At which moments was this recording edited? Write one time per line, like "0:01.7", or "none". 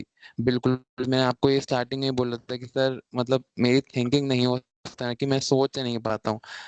none